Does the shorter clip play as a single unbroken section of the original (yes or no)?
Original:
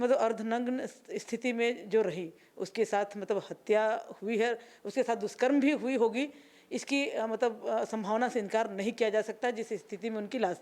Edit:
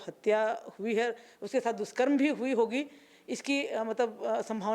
yes